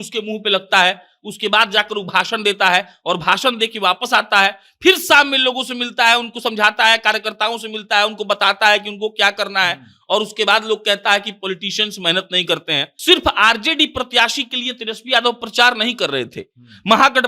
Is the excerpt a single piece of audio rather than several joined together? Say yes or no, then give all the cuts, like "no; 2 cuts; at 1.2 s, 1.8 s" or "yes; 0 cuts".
no; 1 cut; at 12.9 s